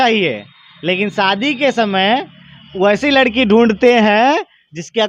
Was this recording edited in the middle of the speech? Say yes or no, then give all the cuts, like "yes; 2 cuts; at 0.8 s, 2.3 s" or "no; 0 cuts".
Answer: no; 0 cuts